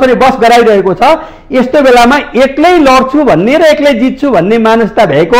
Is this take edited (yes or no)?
no